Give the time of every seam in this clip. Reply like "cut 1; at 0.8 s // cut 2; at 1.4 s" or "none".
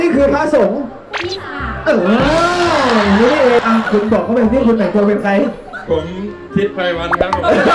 cut 1; at 3.6 s

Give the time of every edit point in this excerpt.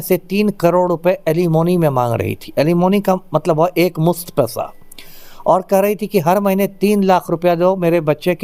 none

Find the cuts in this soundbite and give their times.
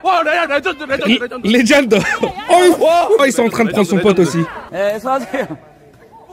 cut 1; at 3.2 s // cut 2; at 4.6 s

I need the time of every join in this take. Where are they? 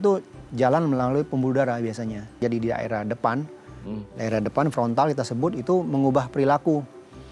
cut 1; at 2.4 s

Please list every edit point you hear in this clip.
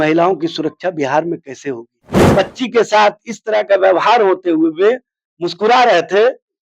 cut 1; at 2.3 s

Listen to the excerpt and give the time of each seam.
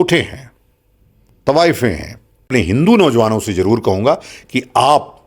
cut 1; at 2.5 s

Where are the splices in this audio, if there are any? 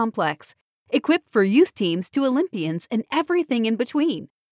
none

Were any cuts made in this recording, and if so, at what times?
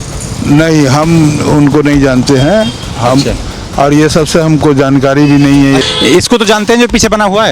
cut 1; at 5.8 s

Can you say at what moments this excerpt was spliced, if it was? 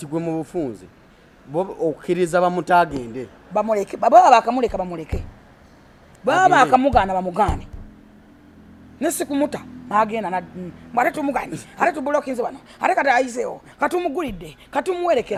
none

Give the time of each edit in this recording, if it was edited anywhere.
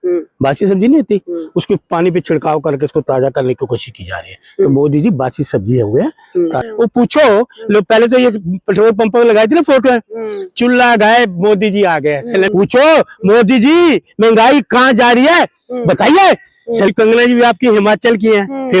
cut 1; at 6.7 s // cut 2; at 12.5 s // cut 3; at 16.9 s

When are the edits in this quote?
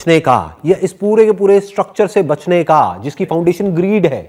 none

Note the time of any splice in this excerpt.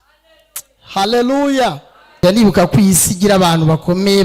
cut 1; at 2.2 s

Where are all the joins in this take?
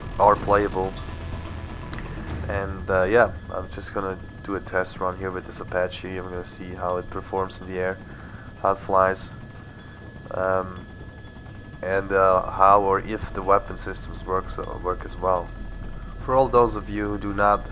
cut 1; at 4.4 s

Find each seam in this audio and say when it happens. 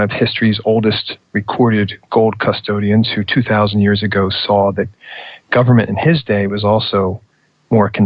cut 1; at 2.4 s

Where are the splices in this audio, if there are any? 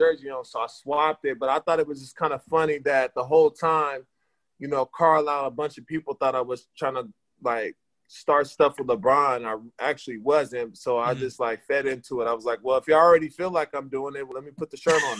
cut 1; at 14.3 s

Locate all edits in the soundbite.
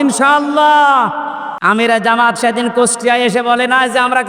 cut 1; at 1.5 s

